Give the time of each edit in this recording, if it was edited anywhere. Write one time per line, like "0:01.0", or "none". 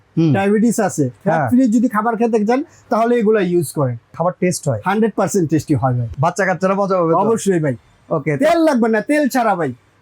0:01.2
0:04.1
0:06.0